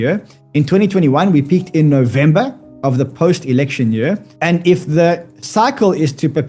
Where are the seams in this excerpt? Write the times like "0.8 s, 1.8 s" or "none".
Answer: 4.3 s